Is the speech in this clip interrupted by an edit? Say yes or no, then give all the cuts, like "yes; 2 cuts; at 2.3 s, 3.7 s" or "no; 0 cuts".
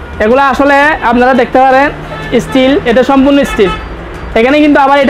no; 0 cuts